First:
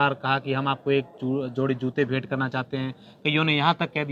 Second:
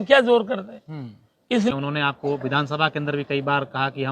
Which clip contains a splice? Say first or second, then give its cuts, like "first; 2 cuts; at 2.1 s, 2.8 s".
second; 1 cut; at 1.7 s